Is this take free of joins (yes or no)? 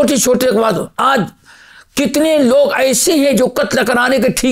yes